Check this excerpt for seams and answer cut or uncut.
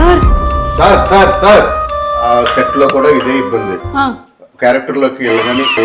cut